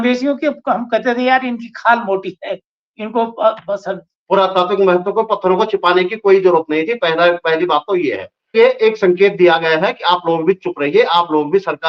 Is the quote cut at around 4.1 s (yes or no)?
yes